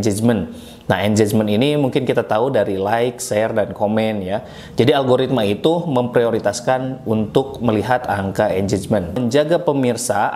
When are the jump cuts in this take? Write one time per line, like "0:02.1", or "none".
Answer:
0:09.1